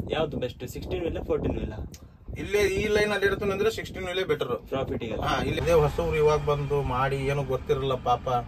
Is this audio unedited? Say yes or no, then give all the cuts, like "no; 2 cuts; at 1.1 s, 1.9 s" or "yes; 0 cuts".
no; 1 cut; at 5.6 s